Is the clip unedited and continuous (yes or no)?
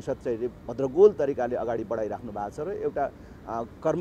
yes